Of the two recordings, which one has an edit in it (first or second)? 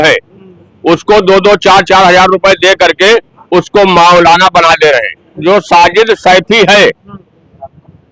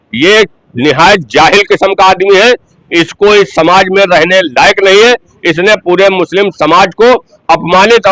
first